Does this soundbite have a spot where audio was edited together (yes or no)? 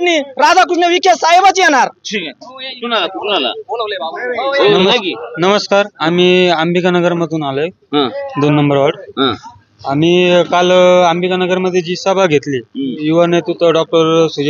no